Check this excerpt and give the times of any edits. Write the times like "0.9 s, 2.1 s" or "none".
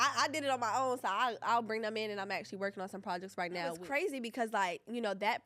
3.8 s